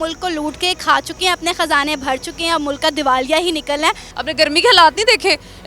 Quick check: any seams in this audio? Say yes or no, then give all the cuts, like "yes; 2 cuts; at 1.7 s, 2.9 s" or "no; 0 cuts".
yes; 1 cut; at 4.1 s